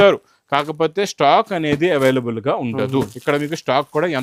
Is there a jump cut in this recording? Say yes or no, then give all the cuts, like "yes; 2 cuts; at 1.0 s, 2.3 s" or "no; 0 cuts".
no; 0 cuts